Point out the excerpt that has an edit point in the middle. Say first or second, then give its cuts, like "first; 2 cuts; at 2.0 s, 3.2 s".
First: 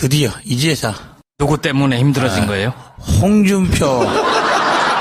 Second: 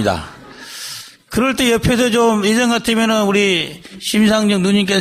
first; 1 cut; at 1.7 s